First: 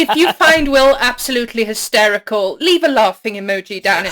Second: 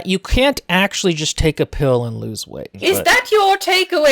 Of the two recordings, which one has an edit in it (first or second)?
second